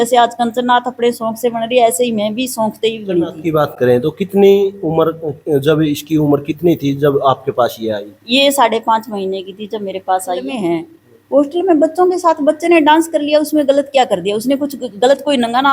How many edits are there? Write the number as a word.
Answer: two